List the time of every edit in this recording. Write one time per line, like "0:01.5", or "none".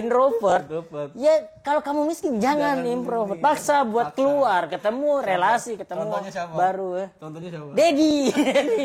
none